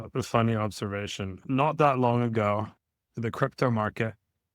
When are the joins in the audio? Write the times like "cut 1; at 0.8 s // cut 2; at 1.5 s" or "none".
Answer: cut 1; at 1.3 s